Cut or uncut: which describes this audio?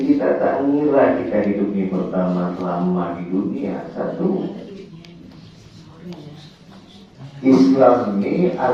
uncut